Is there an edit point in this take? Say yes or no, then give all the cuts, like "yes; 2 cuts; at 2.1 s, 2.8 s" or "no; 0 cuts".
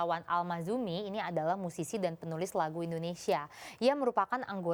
no; 0 cuts